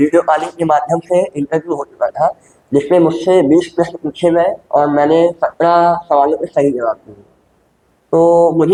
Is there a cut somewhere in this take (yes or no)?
no